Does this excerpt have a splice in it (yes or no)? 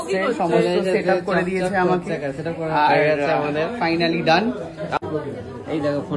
yes